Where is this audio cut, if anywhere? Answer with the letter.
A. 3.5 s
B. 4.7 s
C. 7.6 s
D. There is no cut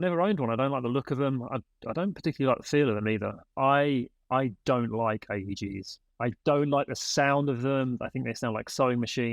A